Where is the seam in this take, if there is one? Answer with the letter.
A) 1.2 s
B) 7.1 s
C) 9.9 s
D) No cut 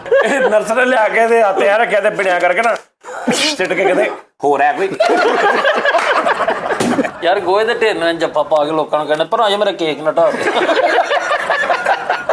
B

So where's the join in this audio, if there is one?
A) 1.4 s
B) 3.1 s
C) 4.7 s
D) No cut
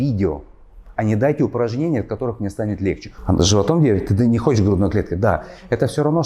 B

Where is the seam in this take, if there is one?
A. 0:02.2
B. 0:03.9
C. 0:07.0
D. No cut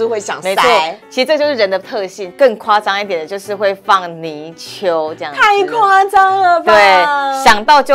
A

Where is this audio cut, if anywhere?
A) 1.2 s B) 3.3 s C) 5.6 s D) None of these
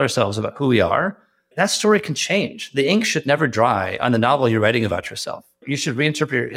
D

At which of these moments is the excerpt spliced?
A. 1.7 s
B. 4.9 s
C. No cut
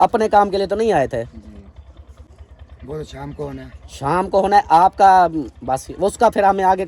C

